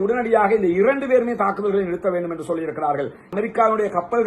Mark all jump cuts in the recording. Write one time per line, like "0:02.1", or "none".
0:03.2